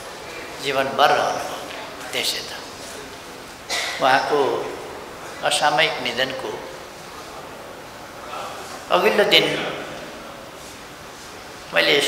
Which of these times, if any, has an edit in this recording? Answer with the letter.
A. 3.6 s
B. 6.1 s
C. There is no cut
A